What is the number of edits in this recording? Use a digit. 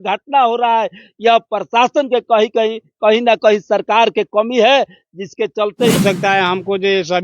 1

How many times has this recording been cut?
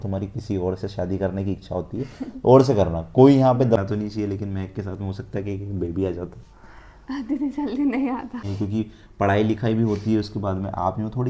2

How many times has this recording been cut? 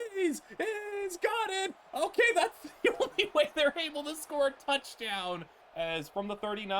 1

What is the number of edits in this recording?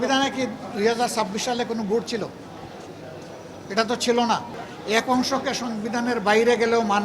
1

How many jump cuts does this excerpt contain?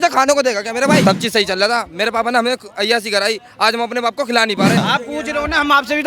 2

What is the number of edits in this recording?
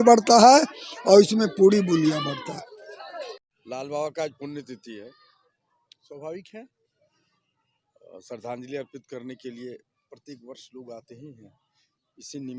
1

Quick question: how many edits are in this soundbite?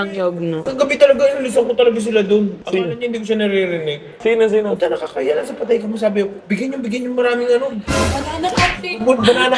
0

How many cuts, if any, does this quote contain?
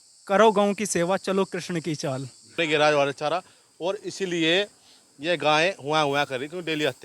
1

